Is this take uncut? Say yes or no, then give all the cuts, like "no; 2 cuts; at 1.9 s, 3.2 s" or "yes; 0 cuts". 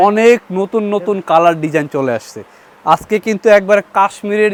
yes; 0 cuts